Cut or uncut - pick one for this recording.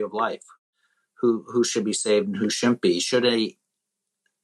uncut